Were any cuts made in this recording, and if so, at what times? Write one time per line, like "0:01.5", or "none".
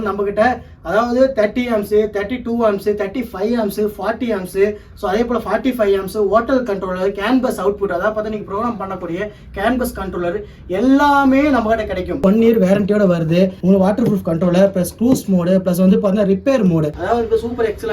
0:12.2
0:13.6
0:17.0